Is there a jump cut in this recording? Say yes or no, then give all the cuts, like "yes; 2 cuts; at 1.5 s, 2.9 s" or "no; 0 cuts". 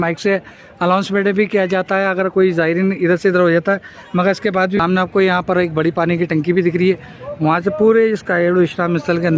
yes; 1 cut; at 4.8 s